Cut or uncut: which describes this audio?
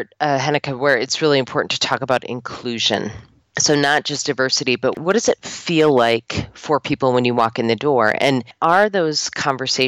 cut